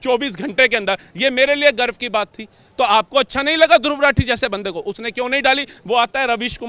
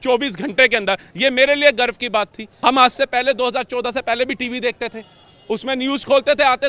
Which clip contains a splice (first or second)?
second